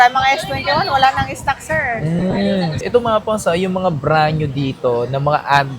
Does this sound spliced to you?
yes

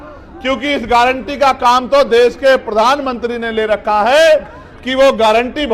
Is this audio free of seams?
yes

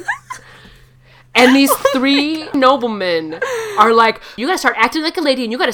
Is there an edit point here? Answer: yes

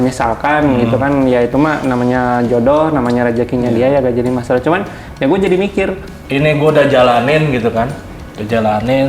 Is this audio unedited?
no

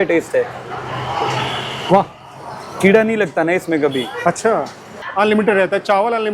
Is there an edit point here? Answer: yes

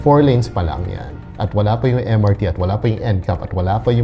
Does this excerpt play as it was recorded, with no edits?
yes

